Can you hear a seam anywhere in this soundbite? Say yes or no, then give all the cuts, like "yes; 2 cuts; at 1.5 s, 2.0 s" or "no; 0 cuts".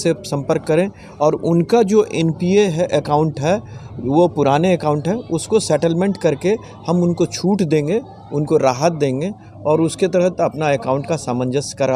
no; 0 cuts